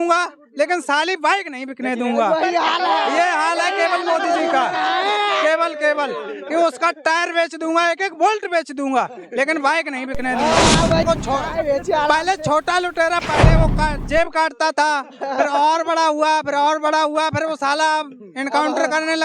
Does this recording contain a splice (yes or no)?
yes